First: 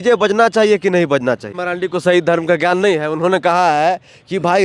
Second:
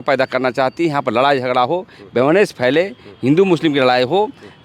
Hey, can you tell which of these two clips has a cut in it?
first; 1 cut; at 1.6 s

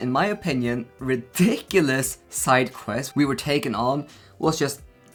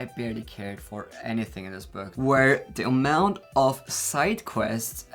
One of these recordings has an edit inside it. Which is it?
second; 1 cut; at 2.1 s

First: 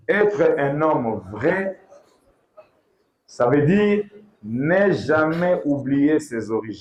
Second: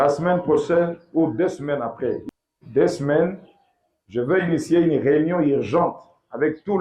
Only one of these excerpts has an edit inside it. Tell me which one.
second; 1 cut; at 2.2 s

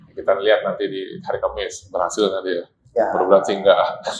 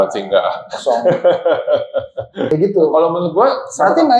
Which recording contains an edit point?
second; 1 cut; at 2.5 s

